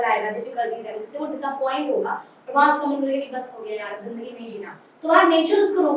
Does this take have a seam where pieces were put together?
no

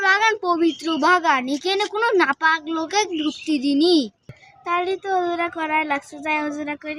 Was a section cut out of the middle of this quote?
no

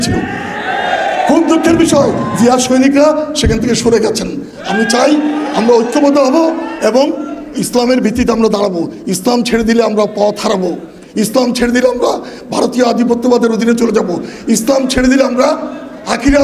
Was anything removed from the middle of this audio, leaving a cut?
no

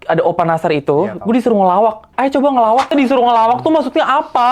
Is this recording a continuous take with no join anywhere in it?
no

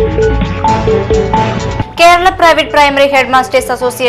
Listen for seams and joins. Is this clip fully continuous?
yes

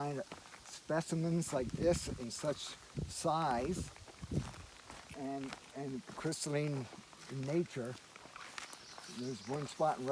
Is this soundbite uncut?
yes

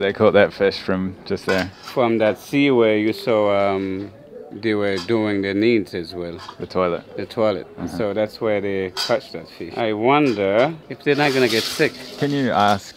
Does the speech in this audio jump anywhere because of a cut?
no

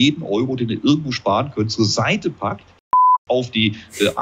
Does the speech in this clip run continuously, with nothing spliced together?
yes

